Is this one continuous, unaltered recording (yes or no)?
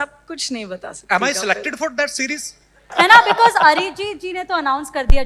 no